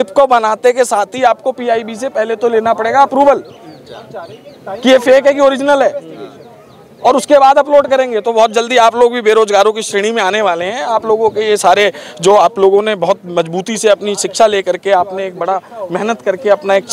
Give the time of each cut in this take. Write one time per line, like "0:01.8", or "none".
none